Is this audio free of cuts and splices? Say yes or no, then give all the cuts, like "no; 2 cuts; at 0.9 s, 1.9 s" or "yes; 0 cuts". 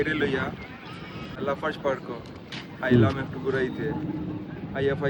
no; 1 cut; at 1.4 s